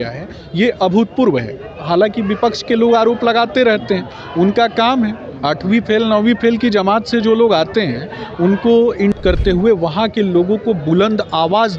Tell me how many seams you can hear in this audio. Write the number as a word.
one